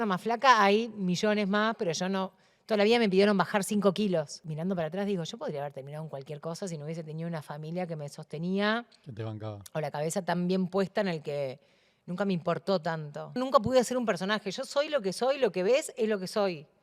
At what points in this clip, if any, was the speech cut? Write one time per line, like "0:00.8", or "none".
0:04.4
0:13.4

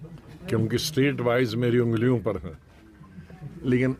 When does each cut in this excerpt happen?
none

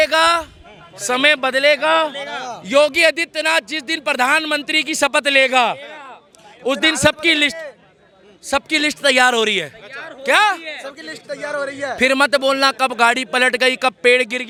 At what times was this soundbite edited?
none

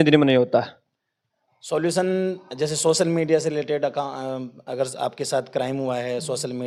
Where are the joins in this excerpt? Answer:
none

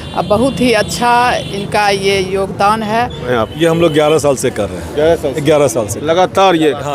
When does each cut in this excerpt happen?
0:03.3

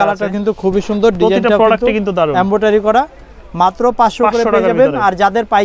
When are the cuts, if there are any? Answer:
none

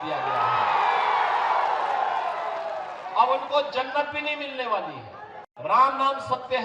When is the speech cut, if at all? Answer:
0:05.4

